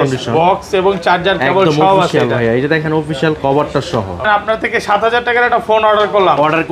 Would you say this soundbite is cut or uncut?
cut